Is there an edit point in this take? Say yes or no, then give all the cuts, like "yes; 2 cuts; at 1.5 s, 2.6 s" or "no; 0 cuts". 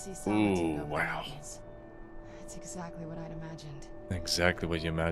yes; 1 cut; at 4.1 s